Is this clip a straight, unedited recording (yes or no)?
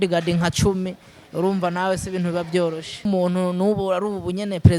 no